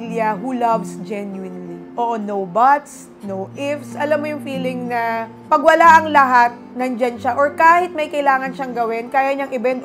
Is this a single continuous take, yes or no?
yes